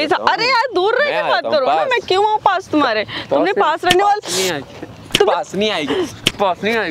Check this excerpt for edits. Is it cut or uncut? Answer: uncut